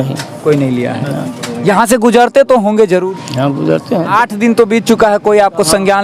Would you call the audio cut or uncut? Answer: cut